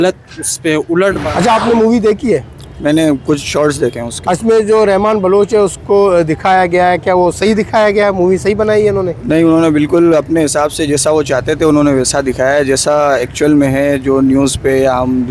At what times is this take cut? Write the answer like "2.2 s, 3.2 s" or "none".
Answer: 1.2 s